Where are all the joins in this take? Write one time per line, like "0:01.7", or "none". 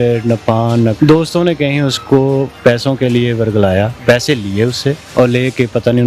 0:00.9
0:02.5
0:03.9
0:05.0